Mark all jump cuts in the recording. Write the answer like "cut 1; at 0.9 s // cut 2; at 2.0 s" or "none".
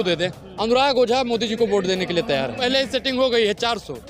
cut 1; at 2.6 s